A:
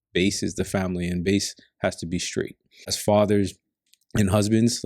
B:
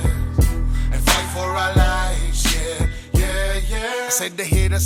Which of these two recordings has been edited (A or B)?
A